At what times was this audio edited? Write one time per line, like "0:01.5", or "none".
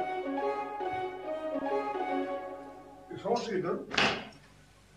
0:01.9